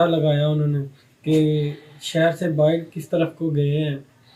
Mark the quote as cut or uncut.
uncut